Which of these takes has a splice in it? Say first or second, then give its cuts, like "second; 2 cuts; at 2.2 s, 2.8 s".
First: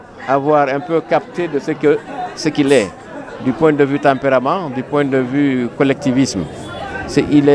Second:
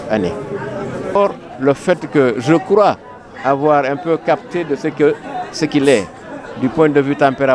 second; 1 cut; at 1.2 s